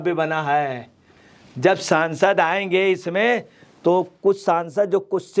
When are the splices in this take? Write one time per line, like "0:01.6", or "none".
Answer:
none

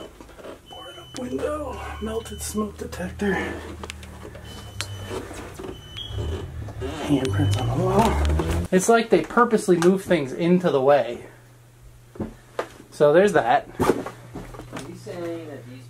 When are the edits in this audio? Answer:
0:08.6

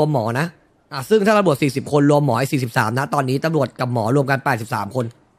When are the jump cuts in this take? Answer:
none

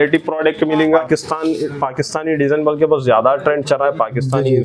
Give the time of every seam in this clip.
0:01.0

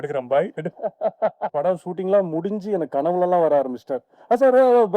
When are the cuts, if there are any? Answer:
0:01.5

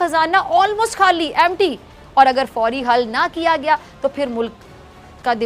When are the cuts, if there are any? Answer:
none

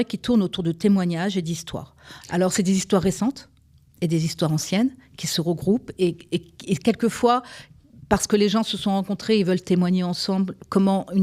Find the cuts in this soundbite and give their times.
none

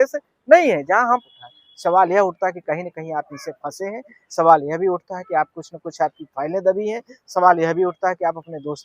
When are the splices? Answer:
0:01.2

